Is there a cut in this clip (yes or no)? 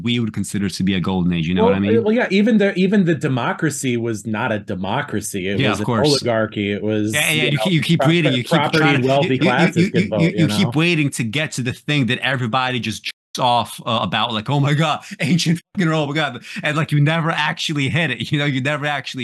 no